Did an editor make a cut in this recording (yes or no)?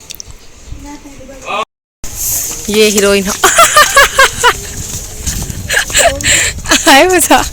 yes